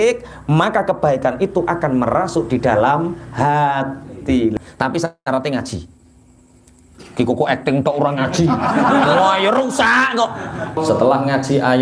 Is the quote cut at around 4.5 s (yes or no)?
yes